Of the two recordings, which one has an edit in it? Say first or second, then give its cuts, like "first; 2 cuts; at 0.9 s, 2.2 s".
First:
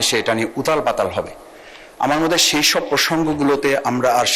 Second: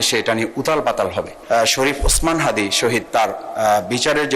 second; 1 cut; at 1.4 s